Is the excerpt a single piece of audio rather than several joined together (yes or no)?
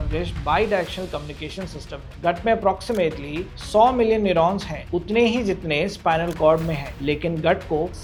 yes